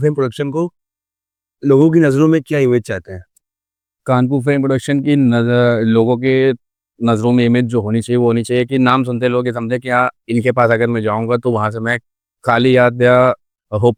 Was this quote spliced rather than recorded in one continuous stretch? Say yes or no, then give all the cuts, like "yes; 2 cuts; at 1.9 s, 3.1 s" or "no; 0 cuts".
no; 0 cuts